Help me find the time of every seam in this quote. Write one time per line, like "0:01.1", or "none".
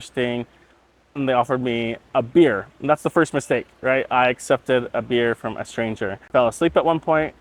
0:06.2